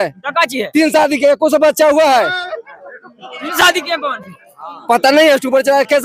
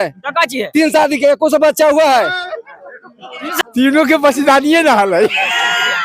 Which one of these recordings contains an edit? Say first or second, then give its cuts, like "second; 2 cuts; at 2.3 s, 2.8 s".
second; 1 cut; at 3.6 s